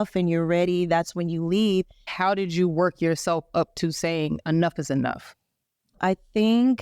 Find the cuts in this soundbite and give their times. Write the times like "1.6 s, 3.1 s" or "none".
2.0 s, 6.0 s

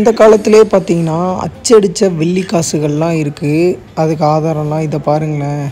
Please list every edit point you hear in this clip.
none

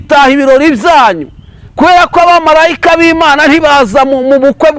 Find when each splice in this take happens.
none

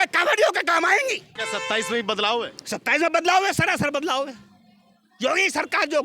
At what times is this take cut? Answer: 1.3 s

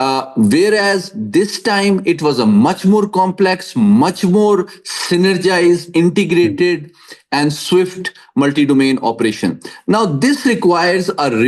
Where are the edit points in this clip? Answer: none

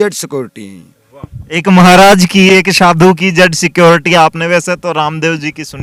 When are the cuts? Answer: none

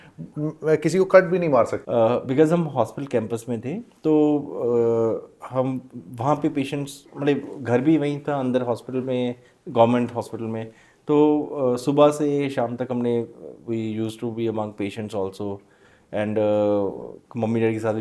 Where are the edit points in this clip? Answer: 1.8 s

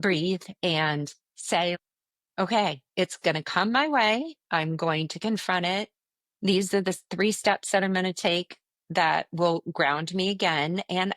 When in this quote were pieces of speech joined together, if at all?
1.8 s

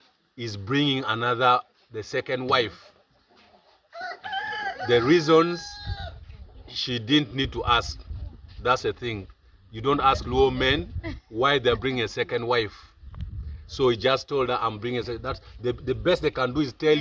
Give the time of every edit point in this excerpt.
none

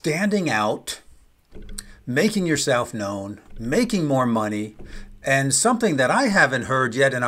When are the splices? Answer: none

